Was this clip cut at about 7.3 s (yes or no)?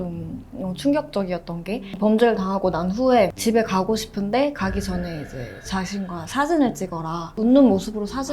yes